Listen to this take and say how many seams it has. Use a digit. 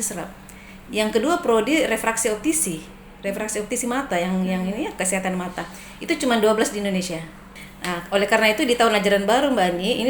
1